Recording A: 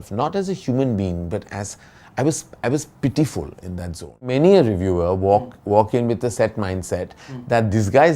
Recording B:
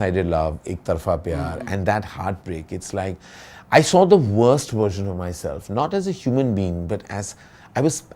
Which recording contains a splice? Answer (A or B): A